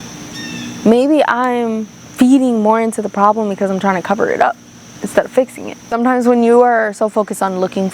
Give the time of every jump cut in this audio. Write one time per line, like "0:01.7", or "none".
0:05.9